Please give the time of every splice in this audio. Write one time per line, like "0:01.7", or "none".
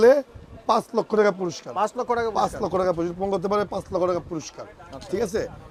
none